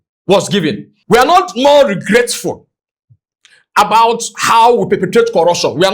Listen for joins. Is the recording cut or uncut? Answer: cut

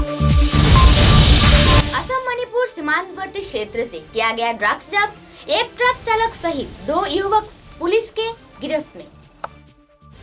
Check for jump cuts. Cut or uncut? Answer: cut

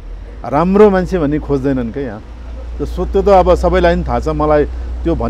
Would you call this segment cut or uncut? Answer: uncut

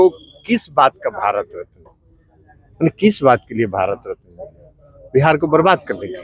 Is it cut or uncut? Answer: uncut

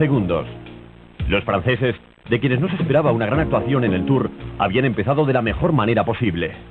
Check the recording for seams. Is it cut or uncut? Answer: cut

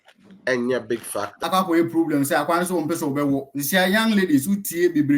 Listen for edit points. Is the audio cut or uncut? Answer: cut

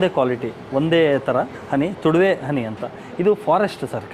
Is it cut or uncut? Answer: uncut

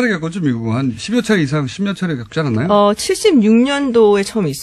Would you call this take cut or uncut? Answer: uncut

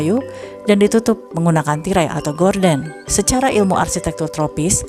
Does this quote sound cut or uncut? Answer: uncut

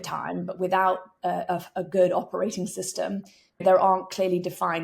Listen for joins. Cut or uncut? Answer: cut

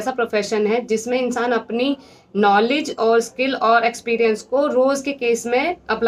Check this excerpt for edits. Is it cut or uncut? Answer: uncut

